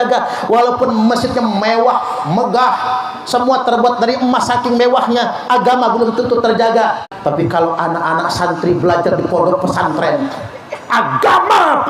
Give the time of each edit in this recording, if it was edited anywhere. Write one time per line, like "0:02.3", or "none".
0:07.1